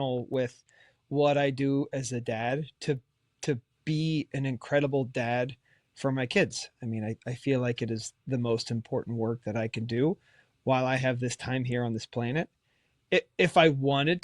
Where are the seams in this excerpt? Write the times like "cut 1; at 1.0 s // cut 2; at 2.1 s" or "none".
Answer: cut 1; at 12.9 s

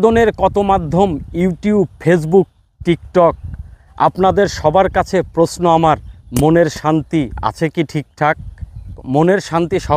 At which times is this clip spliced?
cut 1; at 9.0 s

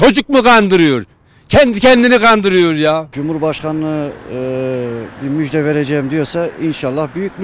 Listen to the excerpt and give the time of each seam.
cut 1; at 3.1 s

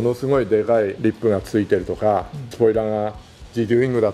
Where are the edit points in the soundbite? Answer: none

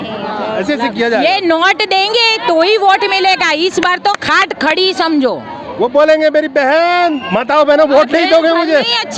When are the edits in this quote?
none

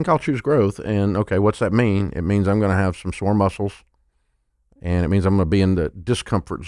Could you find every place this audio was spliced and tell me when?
none

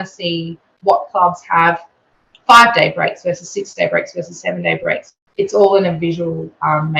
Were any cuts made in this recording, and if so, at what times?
cut 1; at 5.2 s

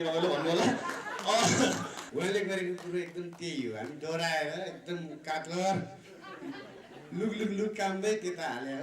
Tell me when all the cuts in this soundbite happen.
cut 1; at 2.0 s

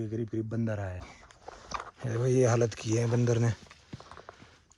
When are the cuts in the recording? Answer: cut 1; at 1.0 s

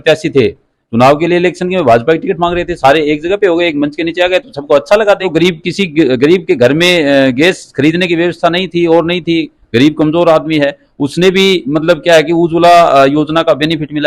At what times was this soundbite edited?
cut 1; at 5.3 s

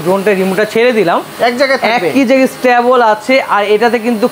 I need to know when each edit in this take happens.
none

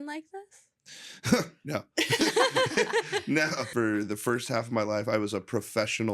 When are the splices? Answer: cut 1; at 3.7 s

